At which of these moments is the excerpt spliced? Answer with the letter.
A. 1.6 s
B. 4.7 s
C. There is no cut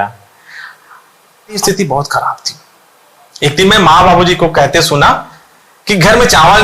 A